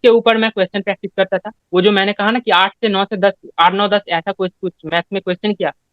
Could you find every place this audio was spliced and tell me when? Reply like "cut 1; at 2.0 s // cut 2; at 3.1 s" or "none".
cut 1; at 1.6 s